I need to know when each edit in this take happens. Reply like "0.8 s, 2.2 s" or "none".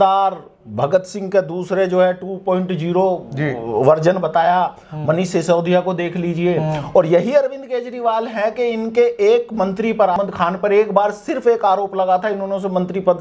none